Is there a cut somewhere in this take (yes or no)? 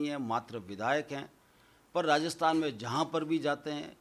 no